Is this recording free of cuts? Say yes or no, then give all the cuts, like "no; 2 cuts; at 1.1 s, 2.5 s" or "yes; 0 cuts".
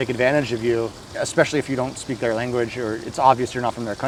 yes; 0 cuts